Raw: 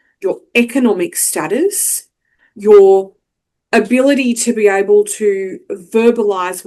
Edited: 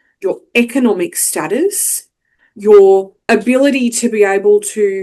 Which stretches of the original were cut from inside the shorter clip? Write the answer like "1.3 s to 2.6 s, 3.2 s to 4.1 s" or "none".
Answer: 3.1 s to 3.6 s